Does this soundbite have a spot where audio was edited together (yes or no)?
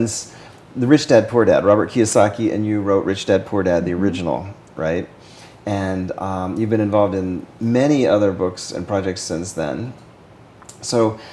no